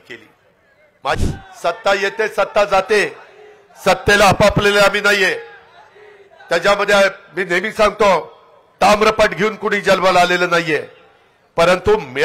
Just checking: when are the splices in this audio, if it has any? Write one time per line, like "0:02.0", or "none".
0:01.2